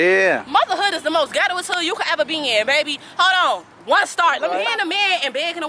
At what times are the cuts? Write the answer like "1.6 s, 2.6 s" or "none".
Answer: 4.7 s